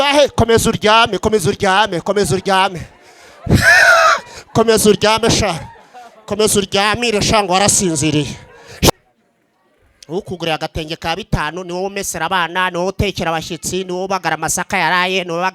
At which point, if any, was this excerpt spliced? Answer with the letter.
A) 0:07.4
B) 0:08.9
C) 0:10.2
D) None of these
B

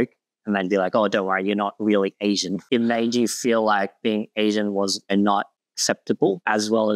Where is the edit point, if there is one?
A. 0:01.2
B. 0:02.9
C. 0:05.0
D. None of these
C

